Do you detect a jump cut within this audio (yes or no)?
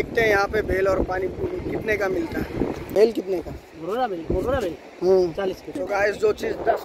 no